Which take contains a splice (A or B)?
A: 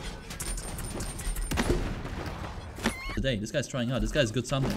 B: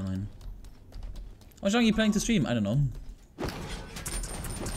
A